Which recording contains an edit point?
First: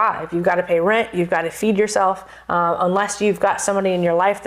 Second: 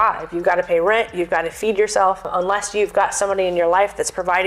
second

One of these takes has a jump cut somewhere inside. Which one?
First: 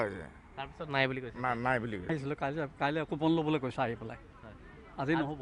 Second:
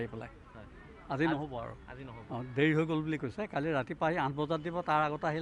first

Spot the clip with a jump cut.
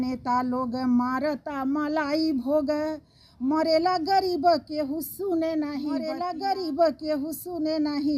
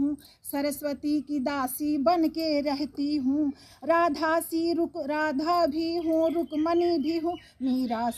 first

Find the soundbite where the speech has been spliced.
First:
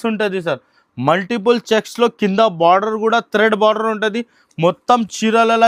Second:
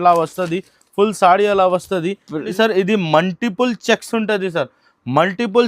second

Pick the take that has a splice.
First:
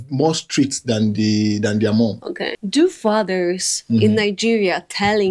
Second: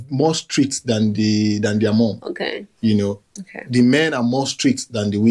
first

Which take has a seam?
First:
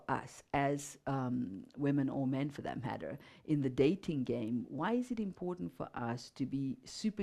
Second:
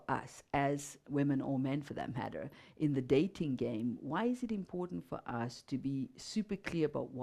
second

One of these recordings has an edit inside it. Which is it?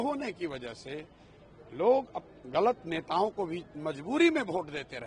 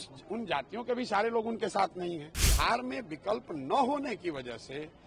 second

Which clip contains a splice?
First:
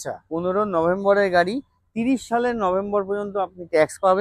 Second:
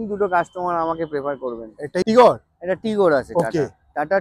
second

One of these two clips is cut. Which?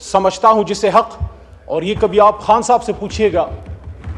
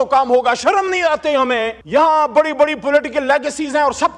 second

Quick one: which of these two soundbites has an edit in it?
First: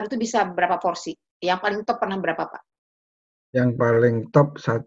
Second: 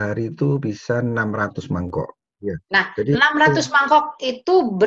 second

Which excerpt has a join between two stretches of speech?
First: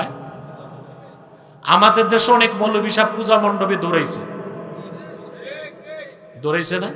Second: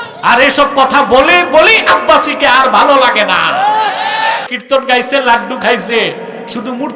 second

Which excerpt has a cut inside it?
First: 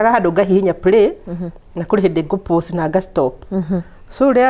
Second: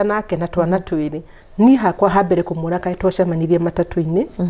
second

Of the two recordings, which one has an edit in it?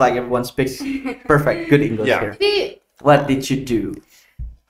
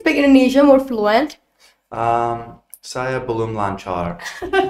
first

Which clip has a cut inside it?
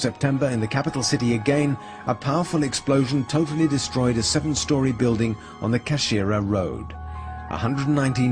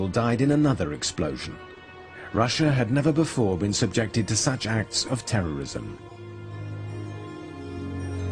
second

